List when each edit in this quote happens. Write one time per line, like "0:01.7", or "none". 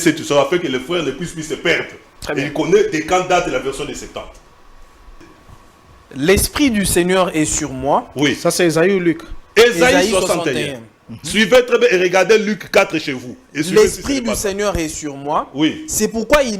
0:05.2

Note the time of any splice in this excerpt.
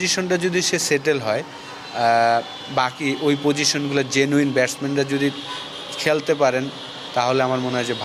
none

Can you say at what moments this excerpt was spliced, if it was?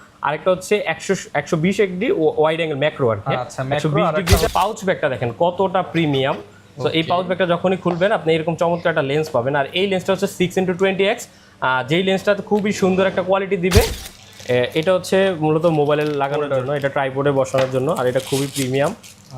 0:04.5
0:14.0

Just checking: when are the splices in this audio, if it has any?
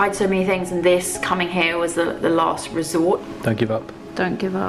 0:03.2

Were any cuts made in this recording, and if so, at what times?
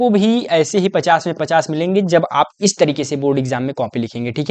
none

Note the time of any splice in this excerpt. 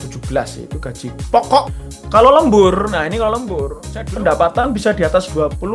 0:01.7
0:03.9

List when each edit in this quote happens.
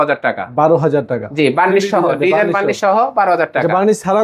none

